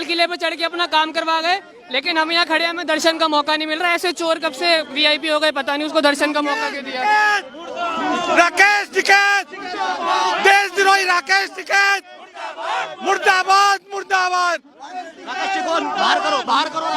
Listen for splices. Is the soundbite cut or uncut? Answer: uncut